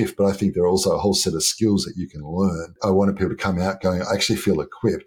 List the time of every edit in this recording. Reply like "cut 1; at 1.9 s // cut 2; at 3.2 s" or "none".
cut 1; at 2.7 s

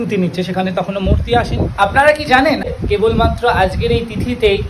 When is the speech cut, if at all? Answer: cut 1; at 1.6 s // cut 2; at 2.7 s

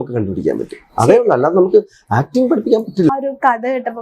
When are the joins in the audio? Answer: cut 1; at 3.1 s

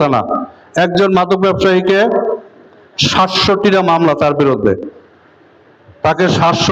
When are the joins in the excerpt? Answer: none

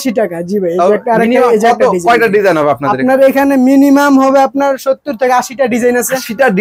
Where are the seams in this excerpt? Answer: none

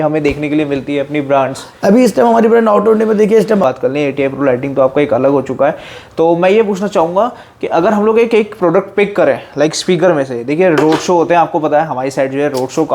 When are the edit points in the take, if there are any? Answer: cut 1; at 3.6 s

